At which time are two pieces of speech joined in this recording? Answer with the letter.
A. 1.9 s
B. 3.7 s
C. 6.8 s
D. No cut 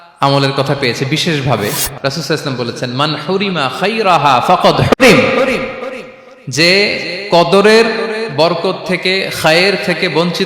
A